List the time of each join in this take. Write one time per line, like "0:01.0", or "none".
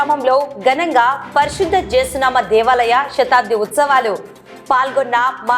none